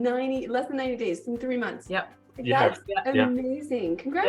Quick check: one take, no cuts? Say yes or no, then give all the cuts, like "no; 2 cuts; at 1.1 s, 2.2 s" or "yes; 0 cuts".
no; 1 cut; at 1.8 s